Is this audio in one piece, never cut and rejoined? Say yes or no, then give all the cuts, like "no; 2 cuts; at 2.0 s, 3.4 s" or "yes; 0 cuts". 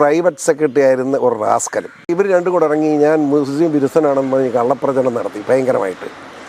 no; 1 cut; at 2.1 s